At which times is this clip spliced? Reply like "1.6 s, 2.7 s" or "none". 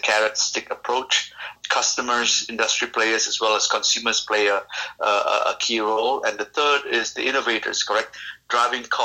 1.5 s